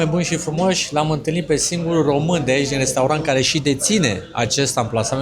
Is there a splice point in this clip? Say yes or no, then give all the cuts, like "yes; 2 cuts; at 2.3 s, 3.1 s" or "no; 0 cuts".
no; 0 cuts